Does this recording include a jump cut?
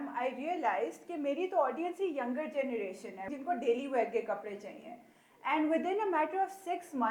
yes; 1 cut; at 3.3 s

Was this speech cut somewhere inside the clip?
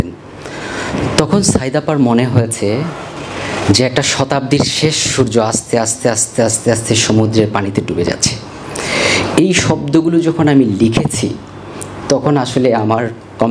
no; 0 cuts

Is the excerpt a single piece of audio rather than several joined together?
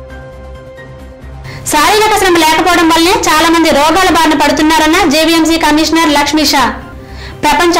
yes; 0 cuts

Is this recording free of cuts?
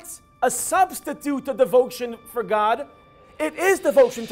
no; 1 cut; at 2.9 s

